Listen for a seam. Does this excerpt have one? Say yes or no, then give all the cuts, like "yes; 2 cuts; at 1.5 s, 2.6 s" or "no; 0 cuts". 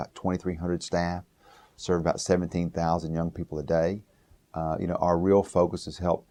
no; 0 cuts